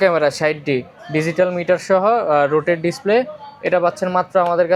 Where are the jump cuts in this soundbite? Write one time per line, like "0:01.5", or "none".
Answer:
none